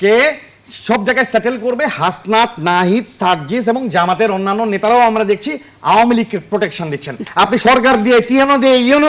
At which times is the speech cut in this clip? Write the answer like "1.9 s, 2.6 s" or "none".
7.3 s

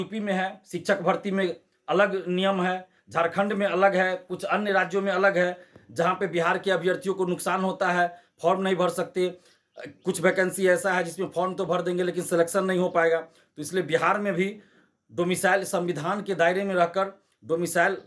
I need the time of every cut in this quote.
none

